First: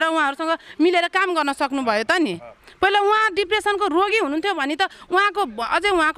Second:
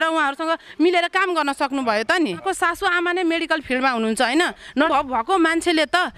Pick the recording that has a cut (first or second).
second